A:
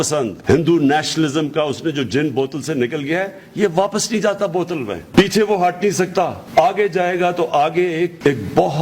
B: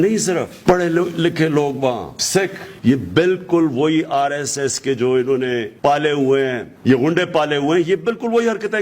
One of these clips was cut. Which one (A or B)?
B